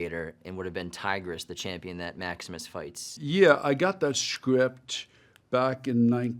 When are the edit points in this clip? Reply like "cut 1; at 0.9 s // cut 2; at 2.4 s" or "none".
cut 1; at 3.1 s